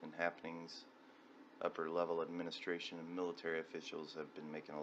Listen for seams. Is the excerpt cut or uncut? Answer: cut